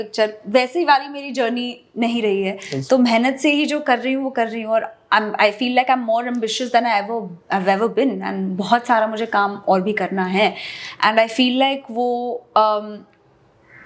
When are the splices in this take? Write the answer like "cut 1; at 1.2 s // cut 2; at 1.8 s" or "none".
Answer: none